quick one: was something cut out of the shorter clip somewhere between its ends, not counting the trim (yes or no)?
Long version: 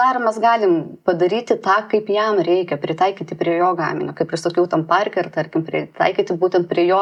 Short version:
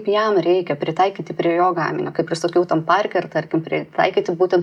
no